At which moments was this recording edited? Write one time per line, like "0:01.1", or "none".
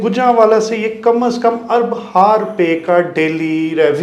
none